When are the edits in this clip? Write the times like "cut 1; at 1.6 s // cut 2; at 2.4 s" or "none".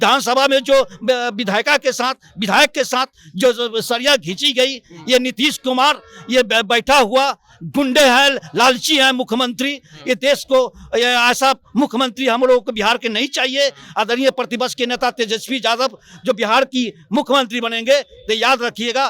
none